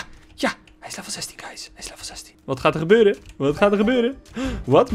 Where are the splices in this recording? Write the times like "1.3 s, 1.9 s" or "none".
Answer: none